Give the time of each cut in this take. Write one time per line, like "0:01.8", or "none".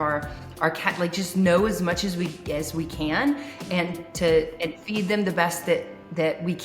none